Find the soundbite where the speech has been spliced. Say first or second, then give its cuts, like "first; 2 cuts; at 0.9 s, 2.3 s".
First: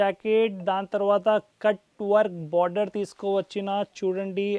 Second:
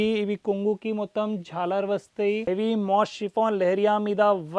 second; 1 cut; at 2.4 s